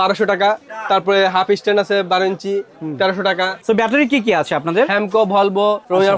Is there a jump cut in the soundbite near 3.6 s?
yes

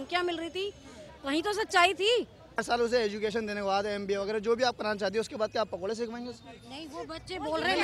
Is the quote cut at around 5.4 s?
no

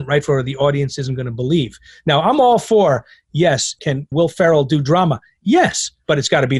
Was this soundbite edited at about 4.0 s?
yes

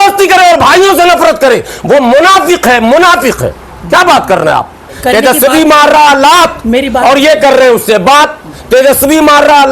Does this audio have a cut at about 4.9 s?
yes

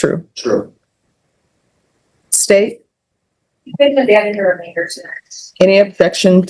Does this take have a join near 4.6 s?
no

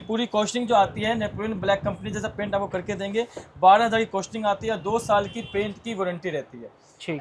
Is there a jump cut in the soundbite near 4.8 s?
no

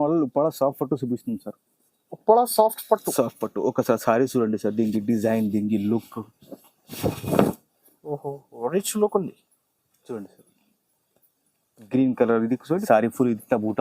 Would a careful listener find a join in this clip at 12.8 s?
yes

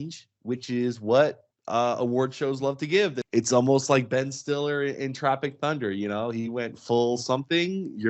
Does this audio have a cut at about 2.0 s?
no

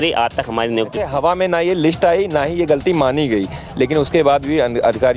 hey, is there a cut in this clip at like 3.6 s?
no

